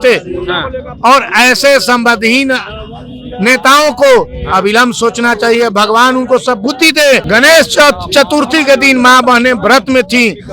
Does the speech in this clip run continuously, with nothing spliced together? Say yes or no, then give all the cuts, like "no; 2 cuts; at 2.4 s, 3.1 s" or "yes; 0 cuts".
no; 1 cut; at 7.2 s